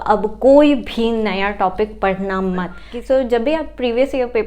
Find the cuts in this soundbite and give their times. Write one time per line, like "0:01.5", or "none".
0:02.8